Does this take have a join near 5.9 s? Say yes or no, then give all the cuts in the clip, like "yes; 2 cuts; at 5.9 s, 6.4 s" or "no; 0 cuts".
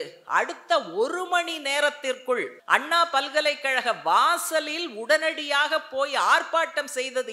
no; 1 cut; at 2.6 s